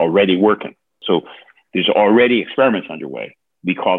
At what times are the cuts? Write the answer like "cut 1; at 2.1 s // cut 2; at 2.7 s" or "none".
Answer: cut 1; at 1.0 s